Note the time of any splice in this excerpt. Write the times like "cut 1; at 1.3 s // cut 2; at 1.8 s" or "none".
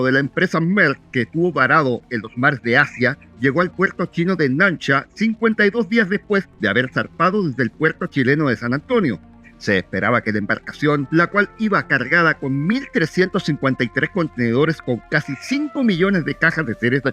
none